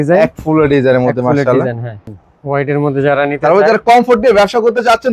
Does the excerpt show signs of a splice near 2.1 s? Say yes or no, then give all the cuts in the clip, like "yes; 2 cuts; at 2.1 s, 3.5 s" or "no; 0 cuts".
yes; 1 cut; at 2.1 s